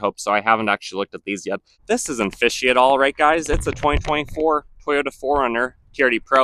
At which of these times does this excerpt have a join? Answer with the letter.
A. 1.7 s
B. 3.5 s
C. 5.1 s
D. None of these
A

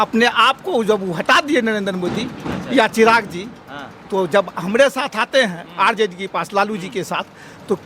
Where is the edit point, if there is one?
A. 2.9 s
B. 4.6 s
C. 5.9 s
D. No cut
D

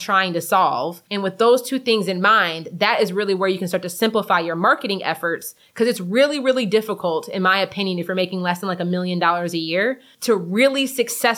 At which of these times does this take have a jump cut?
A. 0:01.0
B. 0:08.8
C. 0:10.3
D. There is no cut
A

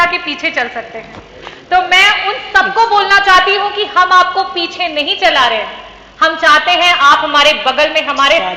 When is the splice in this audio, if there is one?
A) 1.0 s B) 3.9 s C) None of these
C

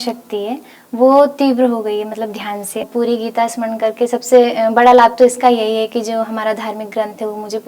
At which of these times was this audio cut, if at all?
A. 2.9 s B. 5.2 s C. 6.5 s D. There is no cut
A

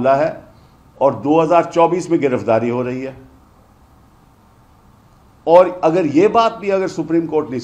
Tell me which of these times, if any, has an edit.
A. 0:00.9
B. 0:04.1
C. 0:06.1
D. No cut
D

